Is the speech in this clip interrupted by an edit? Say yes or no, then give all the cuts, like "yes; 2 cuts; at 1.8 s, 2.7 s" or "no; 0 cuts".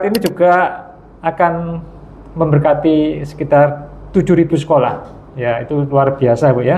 no; 0 cuts